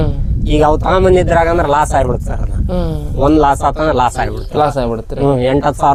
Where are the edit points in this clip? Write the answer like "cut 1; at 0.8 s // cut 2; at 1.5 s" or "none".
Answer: none

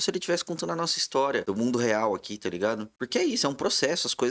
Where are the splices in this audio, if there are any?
cut 1; at 1.4 s // cut 2; at 2.9 s

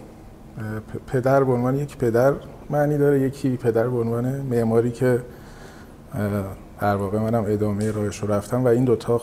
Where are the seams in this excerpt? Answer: none

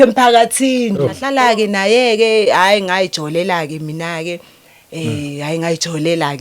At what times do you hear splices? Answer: cut 1; at 1.2 s

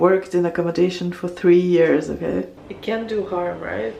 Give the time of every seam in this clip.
cut 1; at 2.6 s

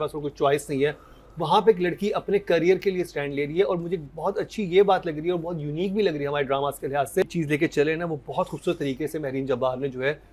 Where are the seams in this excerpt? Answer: cut 1; at 7.2 s

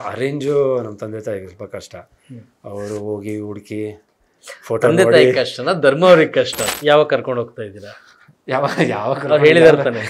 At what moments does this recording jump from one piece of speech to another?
cut 1; at 6.6 s

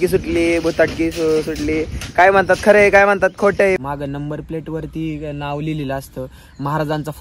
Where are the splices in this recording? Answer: cut 1; at 3.8 s

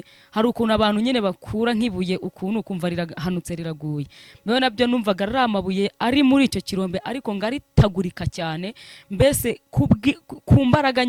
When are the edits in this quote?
none

